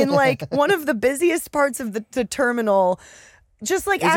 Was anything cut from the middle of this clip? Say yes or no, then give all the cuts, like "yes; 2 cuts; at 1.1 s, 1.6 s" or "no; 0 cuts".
no; 0 cuts